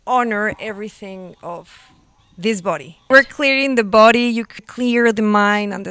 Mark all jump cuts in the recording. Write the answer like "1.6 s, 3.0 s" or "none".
3.1 s, 4.6 s